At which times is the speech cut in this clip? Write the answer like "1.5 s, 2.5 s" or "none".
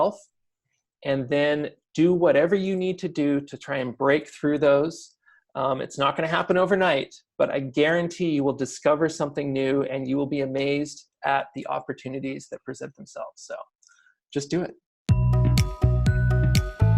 14.9 s